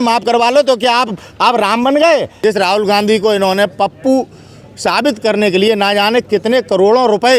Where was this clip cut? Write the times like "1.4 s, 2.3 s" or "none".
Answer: 2.3 s